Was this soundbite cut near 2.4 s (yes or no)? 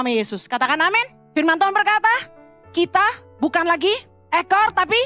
no